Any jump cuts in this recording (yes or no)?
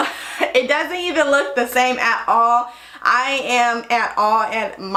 no